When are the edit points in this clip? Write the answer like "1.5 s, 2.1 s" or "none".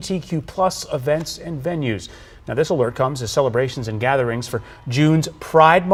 none